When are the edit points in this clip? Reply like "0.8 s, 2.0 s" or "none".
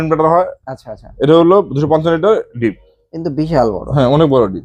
none